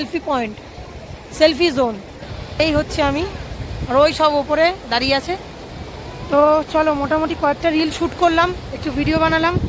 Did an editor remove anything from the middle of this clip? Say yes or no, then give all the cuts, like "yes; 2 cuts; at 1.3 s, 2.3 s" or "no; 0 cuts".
no; 0 cuts